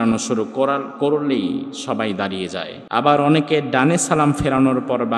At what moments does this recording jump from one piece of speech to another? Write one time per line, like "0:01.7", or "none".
0:02.8